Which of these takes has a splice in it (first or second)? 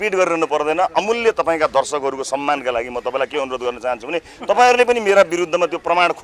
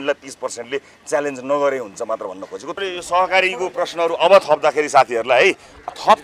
second